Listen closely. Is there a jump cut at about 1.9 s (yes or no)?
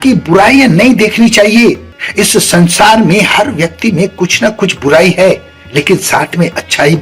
yes